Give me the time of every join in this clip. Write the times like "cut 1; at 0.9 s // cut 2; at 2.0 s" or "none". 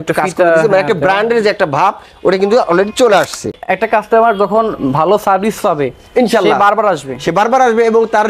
cut 1; at 3.5 s